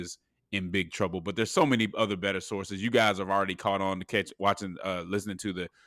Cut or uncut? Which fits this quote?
uncut